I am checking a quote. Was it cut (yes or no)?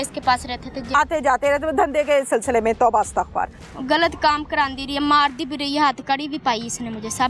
yes